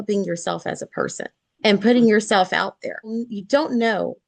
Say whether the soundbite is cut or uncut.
cut